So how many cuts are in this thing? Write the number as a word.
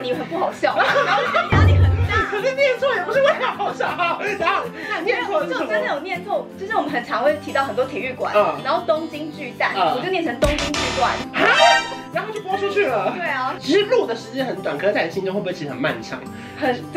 zero